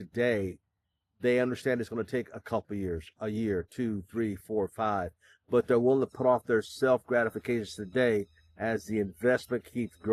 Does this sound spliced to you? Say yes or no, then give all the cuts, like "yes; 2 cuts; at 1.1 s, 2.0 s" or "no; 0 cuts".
no; 0 cuts